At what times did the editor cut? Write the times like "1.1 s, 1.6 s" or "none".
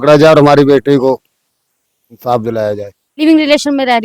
3.0 s